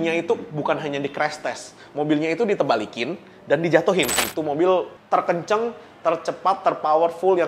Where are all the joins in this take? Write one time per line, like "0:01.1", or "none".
0:04.2